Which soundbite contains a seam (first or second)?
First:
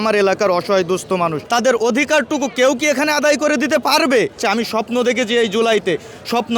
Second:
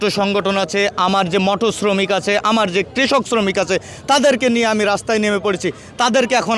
first